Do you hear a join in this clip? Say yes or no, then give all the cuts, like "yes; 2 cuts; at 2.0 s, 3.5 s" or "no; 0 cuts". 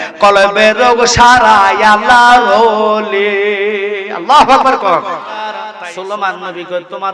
yes; 1 cut; at 5.6 s